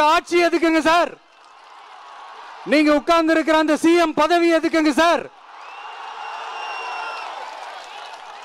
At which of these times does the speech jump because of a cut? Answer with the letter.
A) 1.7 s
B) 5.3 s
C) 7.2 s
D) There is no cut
D